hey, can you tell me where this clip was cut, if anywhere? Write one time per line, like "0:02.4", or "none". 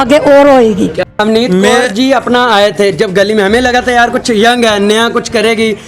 0:01.1